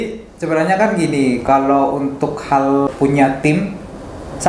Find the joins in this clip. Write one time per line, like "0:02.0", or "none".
0:02.9

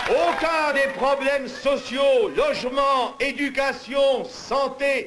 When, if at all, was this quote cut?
none

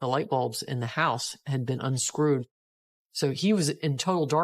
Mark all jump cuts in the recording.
0:02.5

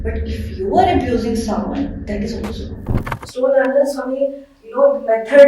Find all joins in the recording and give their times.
0:03.2

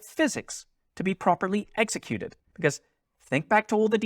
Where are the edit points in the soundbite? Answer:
0:02.4

